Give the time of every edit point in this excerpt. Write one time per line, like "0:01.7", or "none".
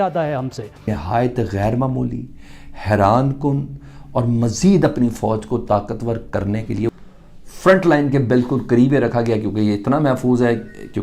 0:00.9
0:06.9